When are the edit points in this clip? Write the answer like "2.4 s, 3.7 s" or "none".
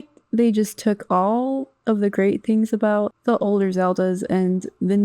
3.1 s